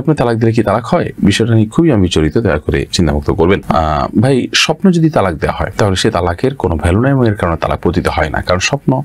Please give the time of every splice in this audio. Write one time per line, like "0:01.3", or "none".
none